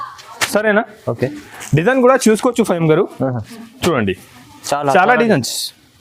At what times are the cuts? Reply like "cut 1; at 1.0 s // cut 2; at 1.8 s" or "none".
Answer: none